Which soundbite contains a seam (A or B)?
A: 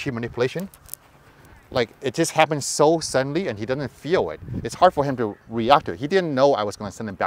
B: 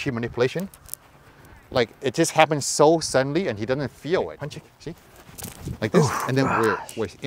B